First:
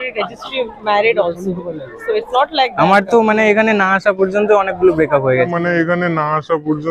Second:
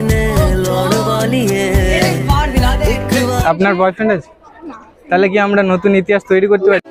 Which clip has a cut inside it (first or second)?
second